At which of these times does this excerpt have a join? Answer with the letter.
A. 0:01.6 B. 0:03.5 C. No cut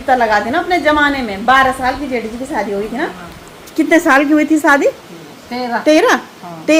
C